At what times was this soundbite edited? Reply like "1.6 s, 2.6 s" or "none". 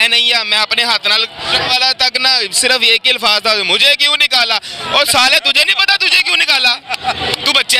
1.5 s